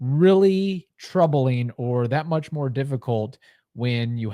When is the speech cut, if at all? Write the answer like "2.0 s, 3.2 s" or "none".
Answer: 0.9 s